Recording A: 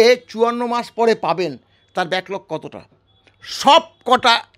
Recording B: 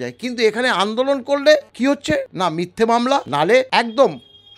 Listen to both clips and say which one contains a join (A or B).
B